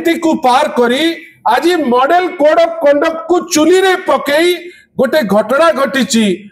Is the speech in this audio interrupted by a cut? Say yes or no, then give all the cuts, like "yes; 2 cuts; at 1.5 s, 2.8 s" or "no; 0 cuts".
no; 0 cuts